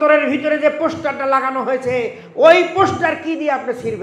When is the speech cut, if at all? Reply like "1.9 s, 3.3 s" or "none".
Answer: none